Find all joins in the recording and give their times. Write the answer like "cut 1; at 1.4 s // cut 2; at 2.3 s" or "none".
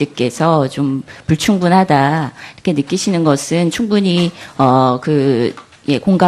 cut 1; at 5.2 s